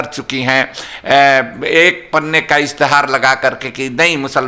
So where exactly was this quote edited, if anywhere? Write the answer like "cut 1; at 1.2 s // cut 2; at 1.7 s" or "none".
none